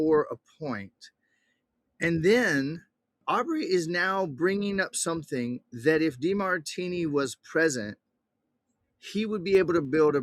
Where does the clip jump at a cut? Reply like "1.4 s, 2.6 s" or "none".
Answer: 3.2 s